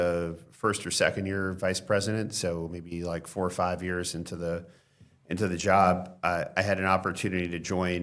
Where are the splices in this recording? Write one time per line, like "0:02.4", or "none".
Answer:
none